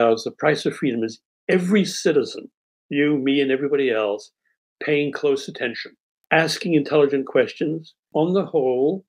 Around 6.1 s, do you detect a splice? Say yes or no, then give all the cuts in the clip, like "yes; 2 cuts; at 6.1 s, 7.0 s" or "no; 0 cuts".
yes; 2 cuts; at 6.1 s, 8.1 s